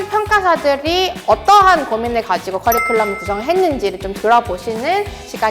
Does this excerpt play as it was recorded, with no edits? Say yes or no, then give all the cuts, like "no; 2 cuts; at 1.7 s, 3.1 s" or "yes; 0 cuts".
yes; 0 cuts